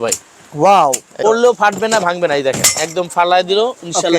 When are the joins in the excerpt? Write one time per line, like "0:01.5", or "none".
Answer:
0:01.2